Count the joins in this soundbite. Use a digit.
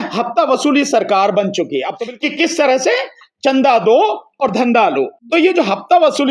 2